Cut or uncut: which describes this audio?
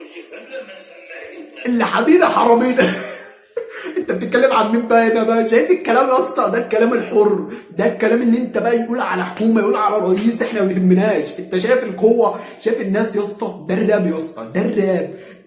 uncut